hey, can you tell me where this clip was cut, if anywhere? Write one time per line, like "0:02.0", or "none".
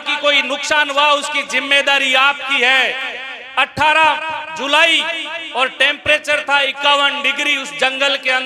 none